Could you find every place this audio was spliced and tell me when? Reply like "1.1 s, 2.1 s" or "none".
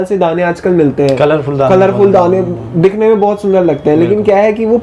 none